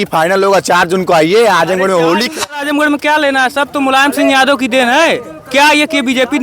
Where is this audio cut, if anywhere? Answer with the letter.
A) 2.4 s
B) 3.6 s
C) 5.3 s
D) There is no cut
A